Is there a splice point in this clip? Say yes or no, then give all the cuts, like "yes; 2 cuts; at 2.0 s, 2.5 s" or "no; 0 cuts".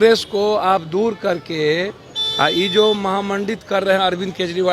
no; 0 cuts